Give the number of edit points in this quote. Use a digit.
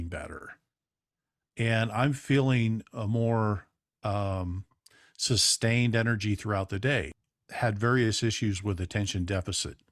1